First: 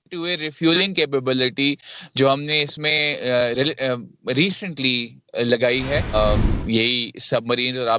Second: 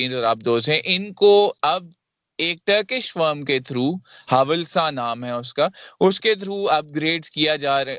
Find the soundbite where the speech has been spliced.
first; 1 cut; at 6.1 s

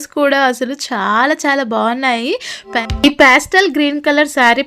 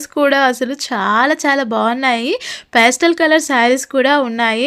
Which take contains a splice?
first; 1 cut; at 2.7 s

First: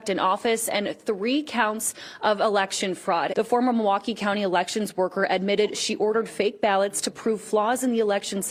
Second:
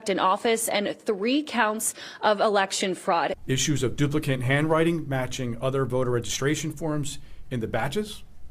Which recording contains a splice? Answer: second; 1 cut; at 3.3 s

